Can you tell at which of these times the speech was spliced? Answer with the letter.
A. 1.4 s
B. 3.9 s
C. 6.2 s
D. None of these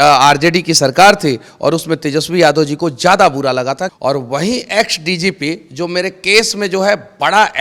B